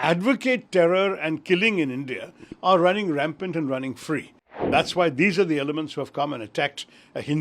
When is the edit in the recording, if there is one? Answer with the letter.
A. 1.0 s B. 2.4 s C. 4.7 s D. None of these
C